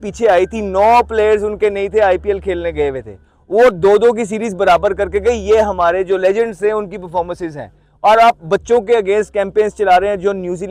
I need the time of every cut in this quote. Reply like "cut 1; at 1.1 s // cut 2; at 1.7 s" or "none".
none